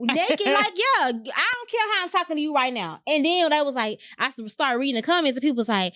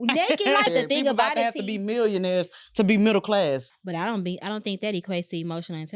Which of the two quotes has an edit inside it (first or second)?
second